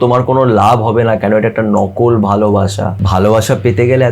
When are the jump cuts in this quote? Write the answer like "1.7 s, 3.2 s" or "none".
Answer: 3.0 s